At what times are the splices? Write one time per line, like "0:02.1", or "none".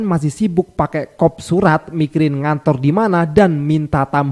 none